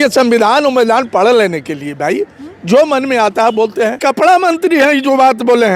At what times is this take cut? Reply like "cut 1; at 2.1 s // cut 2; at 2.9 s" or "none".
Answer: cut 1; at 4.0 s